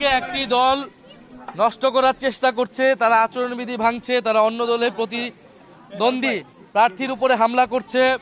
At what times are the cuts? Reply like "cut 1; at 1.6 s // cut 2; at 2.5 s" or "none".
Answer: none